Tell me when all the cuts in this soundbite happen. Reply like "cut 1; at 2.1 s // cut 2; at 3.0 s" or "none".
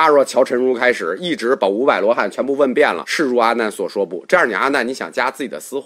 cut 1; at 3.0 s